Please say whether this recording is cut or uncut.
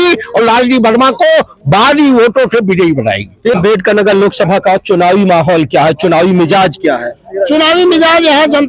cut